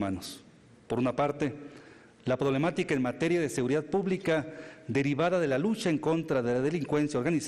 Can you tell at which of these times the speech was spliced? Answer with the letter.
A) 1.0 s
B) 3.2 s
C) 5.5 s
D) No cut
D